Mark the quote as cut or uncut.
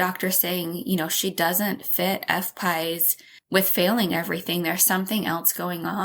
uncut